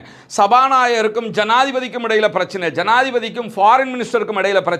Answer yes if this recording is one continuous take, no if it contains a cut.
yes